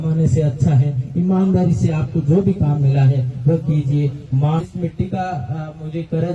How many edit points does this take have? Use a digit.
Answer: 1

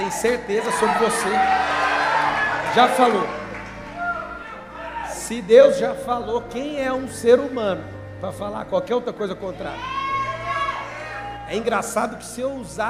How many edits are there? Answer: 0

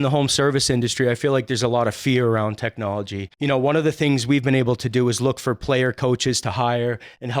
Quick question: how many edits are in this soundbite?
1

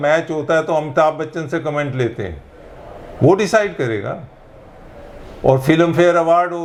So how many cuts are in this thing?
0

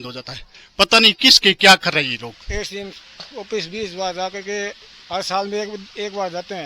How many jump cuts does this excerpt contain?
1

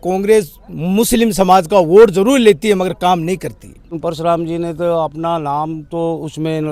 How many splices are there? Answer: 1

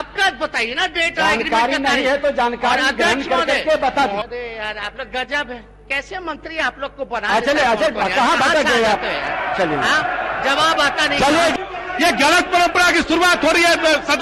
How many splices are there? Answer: 2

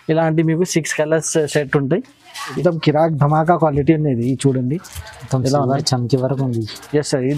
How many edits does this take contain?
1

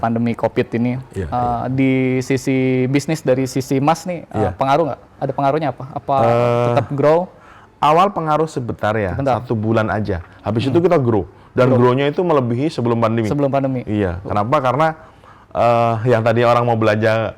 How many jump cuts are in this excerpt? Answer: 0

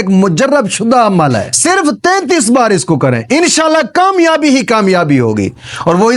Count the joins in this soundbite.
1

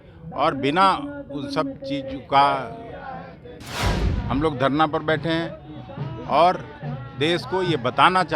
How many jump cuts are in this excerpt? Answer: 1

